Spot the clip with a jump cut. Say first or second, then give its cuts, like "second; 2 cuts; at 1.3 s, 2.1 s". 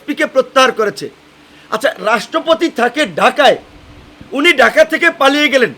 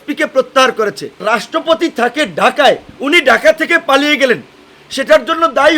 second; 2 cuts; at 1.2 s, 2.9 s